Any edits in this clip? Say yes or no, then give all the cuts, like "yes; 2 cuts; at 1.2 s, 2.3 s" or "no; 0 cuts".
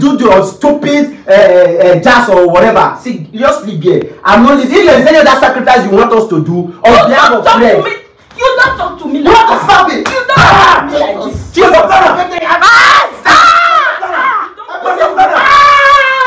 no; 0 cuts